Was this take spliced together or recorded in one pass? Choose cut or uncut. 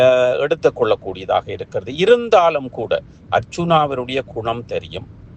uncut